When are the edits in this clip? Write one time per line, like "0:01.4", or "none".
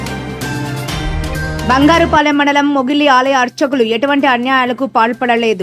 none